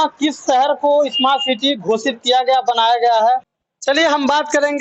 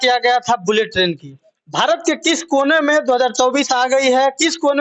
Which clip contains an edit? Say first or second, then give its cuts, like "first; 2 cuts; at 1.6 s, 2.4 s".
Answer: first; 1 cut; at 3.6 s